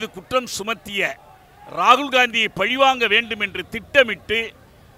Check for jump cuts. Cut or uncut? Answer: uncut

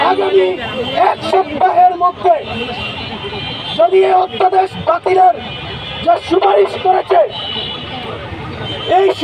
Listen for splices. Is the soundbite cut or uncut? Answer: uncut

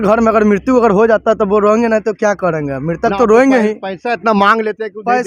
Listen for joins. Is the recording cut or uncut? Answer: uncut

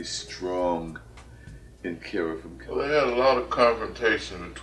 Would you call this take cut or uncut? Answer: cut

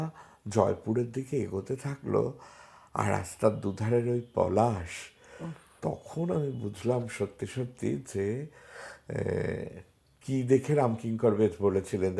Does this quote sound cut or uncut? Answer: uncut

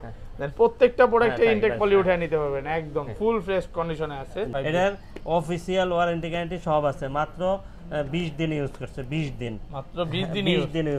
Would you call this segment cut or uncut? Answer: cut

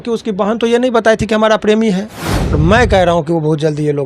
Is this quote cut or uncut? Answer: cut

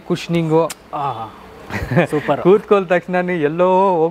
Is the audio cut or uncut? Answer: uncut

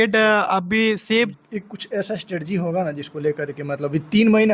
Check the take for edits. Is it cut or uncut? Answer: cut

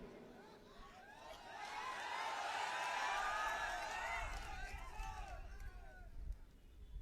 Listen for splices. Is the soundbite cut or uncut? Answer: uncut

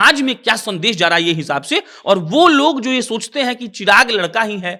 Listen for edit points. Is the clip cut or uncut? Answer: uncut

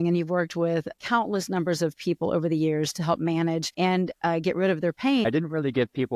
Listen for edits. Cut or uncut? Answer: cut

